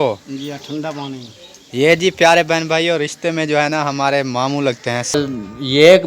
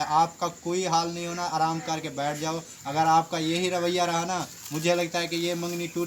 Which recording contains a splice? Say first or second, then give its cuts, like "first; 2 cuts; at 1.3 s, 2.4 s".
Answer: first; 1 cut; at 5.1 s